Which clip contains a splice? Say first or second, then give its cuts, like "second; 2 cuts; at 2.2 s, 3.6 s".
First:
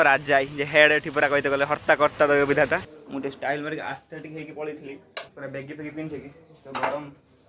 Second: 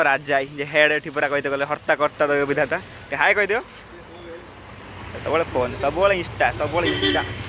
first; 2 cuts; at 3.0 s, 5.3 s